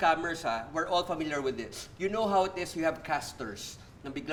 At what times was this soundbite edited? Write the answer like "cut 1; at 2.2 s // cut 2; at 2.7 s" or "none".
none